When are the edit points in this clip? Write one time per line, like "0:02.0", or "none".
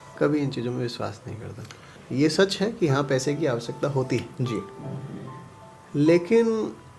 0:02.0